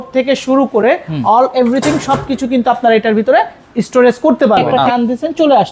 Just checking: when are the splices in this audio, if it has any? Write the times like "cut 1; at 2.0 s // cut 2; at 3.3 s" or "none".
cut 1; at 4.8 s